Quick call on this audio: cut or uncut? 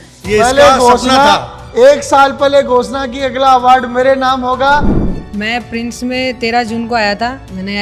cut